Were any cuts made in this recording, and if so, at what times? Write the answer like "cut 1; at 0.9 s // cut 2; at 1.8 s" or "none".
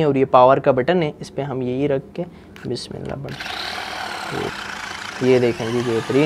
cut 1; at 4.5 s